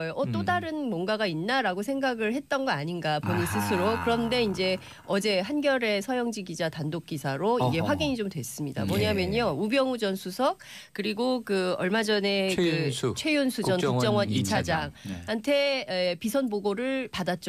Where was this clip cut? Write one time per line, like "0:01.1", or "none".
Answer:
0:04.2

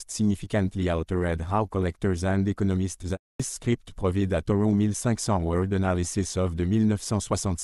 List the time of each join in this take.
0:03.4

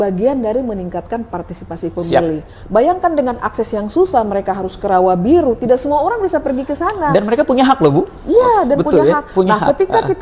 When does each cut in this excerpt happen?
none

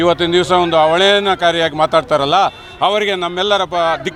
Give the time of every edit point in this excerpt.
none

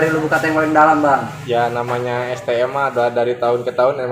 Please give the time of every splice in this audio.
none

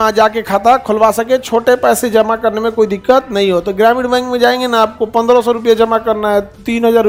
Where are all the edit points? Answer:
none

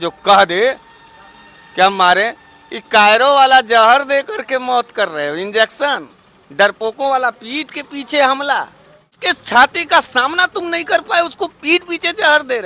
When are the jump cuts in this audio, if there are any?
0:09.2

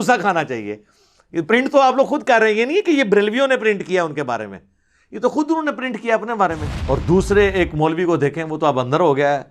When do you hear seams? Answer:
0:06.7

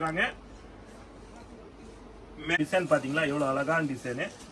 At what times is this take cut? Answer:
0:02.6

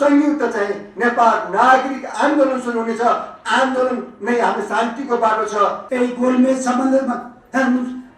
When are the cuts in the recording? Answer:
0:05.8

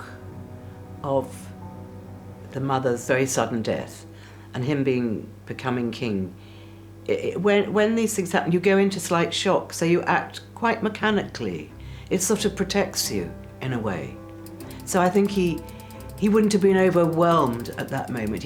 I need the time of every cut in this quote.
0:03.0

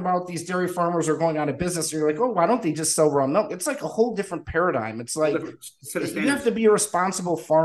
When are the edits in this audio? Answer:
none

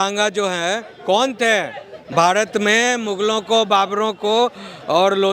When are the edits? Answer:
0:02.1

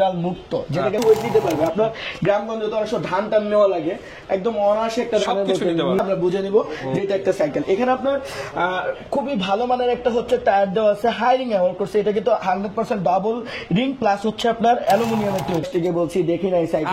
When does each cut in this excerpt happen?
0:01.0
0:06.0
0:15.7

